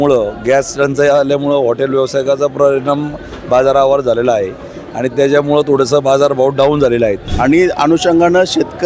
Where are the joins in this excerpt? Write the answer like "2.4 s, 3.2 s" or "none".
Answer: 7.2 s